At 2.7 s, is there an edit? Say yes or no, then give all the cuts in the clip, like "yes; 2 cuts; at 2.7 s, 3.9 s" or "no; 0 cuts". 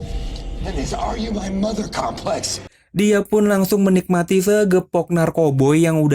yes; 1 cut; at 2.7 s